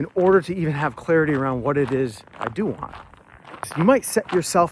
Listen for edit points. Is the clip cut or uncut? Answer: cut